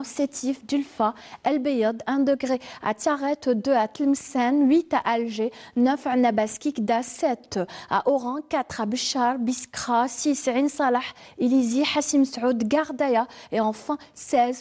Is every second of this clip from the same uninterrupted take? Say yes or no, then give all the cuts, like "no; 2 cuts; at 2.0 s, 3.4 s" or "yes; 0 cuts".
yes; 0 cuts